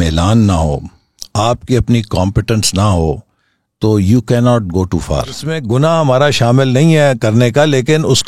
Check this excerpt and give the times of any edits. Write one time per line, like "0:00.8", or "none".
0:05.5